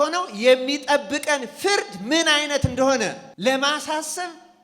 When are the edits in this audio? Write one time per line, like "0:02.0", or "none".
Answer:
0:03.2

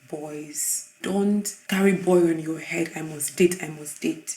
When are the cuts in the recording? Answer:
0:01.0

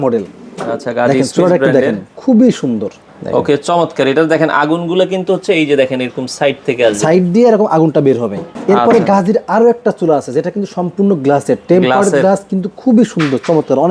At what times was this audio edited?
0:03.1
0:08.4

